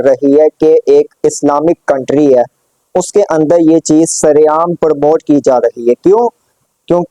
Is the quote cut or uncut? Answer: uncut